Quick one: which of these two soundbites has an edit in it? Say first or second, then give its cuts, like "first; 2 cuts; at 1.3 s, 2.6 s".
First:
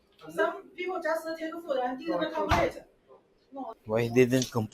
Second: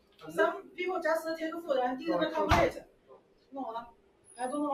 first; 1 cut; at 3.7 s